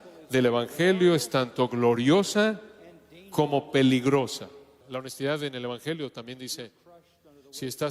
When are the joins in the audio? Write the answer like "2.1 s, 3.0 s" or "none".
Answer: 4.8 s